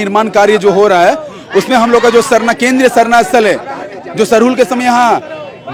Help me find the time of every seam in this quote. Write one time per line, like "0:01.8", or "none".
none